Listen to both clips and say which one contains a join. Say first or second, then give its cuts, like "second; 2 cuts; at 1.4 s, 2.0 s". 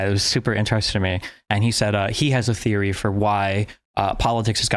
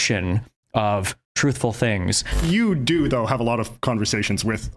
second; 1 cut; at 2.4 s